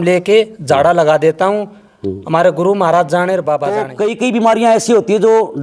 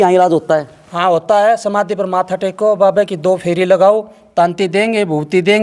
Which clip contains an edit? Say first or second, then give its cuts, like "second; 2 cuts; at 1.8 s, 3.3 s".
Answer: first; 1 cut; at 3.9 s